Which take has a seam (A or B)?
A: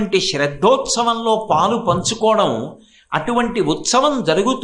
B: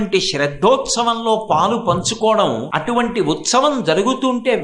B